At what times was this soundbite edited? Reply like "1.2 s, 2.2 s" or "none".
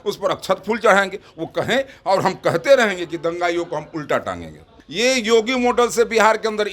4.8 s